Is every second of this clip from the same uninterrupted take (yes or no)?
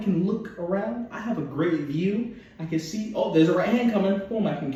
yes